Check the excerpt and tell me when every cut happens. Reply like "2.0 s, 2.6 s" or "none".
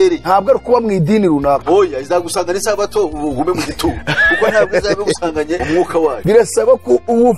none